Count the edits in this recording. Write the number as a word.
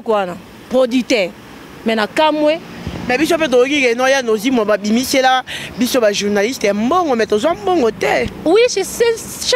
zero